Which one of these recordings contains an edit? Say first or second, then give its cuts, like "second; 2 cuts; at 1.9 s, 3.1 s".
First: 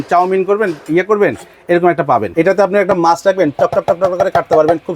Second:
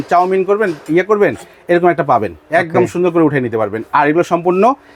first; 1 cut; at 2.3 s